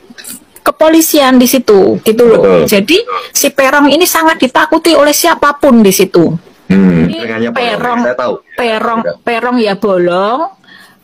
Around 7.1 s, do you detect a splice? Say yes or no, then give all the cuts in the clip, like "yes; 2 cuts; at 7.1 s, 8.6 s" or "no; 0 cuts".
yes; 1 cut; at 7.1 s